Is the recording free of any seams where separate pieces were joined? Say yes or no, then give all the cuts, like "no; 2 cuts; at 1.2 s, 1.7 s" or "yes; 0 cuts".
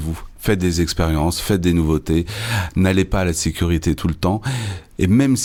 yes; 0 cuts